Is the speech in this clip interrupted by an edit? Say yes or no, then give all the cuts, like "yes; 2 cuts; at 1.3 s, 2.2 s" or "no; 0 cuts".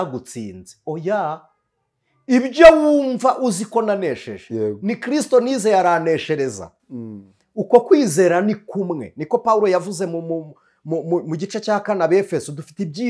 no; 0 cuts